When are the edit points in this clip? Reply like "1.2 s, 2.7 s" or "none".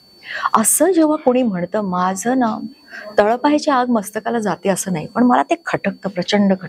none

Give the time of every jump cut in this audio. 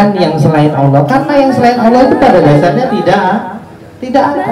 none

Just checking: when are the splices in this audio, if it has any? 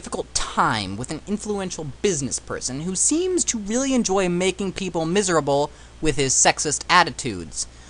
6.3 s

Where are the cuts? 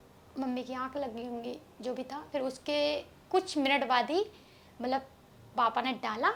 none

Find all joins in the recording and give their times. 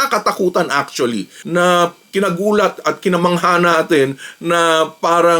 1.4 s

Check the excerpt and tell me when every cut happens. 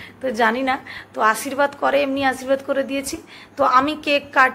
none

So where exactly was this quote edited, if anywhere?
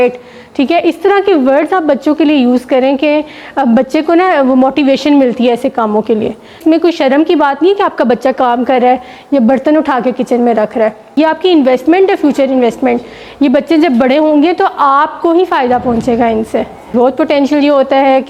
6.6 s, 11.2 s, 16.9 s

